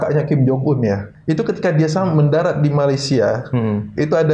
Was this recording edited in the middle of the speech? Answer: yes; 1 cut; at 1.1 s

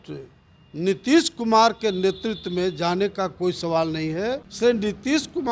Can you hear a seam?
yes; 1 cut; at 4.5 s

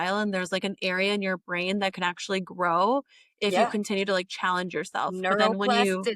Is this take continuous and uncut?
yes; 0 cuts

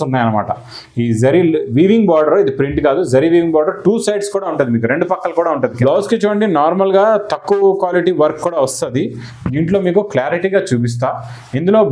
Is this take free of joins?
no; 1 cut; at 5.8 s

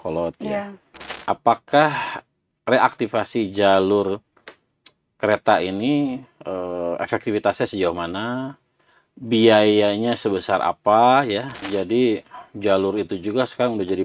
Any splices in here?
yes; 2 cuts; at 1.1 s, 11.6 s

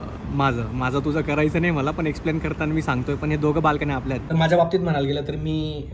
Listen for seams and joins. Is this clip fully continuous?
no; 1 cut; at 4.2 s

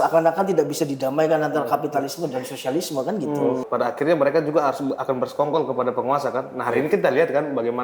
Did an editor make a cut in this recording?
yes; 1 cut; at 3.6 s

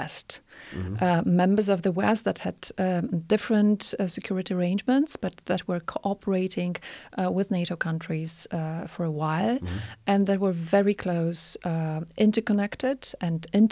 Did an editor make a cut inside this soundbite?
no; 0 cuts

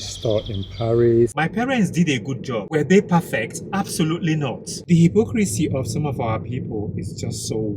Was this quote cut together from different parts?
yes; 2 cuts; at 1.3 s, 4.8 s

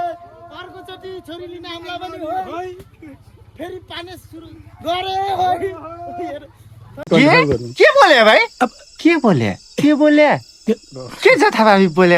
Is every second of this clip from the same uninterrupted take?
yes; 0 cuts

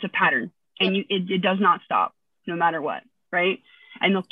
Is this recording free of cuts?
yes; 0 cuts

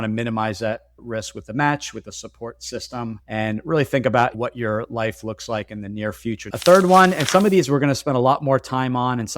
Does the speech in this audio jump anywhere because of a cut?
yes; 1 cut; at 6.4 s

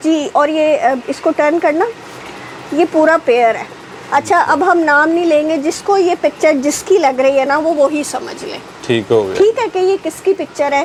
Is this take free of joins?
yes; 0 cuts

